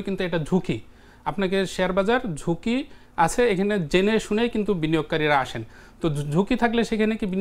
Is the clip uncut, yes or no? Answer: yes